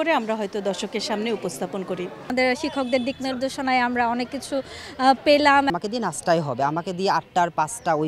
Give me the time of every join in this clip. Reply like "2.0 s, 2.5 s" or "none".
2.2 s, 5.7 s